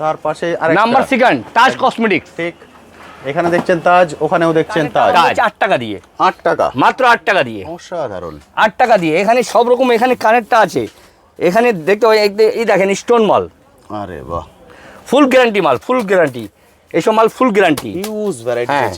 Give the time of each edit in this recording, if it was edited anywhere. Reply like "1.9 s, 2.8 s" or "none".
5.3 s